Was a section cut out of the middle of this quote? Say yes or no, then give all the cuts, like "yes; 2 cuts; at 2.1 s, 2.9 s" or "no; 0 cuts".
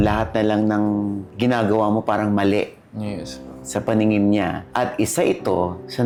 no; 0 cuts